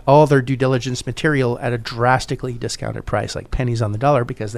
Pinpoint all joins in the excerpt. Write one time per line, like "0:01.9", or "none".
none